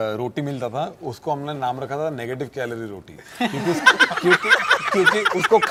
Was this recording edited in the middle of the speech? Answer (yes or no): no